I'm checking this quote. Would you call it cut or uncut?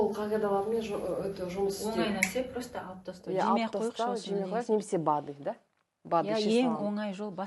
uncut